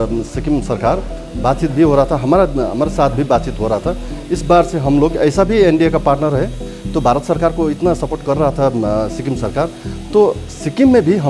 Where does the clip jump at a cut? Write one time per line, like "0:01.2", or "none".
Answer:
none